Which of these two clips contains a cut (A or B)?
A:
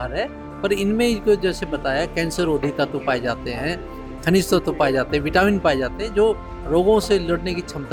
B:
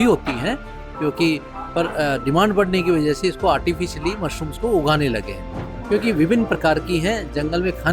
B